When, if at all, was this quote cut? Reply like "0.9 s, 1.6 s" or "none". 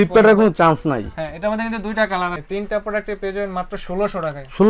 2.4 s